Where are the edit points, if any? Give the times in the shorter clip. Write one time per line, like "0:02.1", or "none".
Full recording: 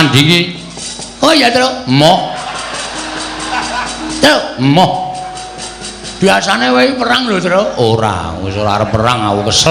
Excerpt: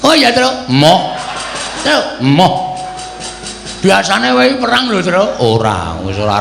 0:01.8